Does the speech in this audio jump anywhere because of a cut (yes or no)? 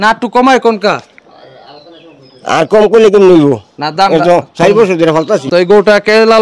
yes